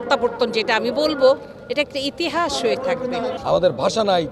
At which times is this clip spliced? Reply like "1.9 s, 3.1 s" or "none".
3.4 s